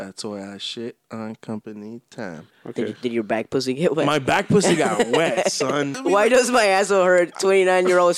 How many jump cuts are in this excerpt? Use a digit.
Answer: 2